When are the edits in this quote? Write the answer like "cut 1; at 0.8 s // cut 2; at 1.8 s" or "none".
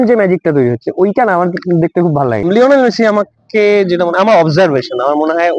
cut 1; at 2.5 s